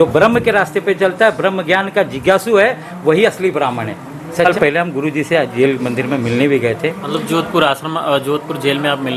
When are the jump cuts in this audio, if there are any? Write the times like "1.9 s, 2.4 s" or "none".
4.5 s